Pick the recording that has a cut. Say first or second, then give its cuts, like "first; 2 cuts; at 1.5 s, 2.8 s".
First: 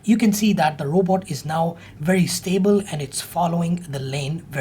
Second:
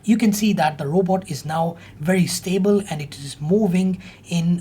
first; 1 cut; at 2.9 s